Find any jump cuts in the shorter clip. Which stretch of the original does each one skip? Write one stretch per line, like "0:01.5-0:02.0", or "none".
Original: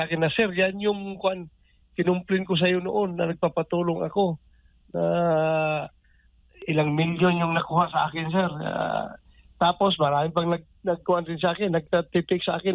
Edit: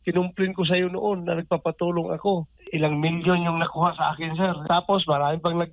0:04.5-0:06.5
0:08.5-0:09.5